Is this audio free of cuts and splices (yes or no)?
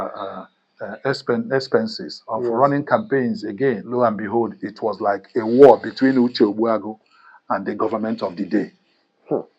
no